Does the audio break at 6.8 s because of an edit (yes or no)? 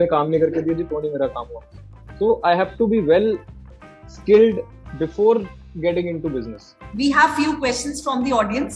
yes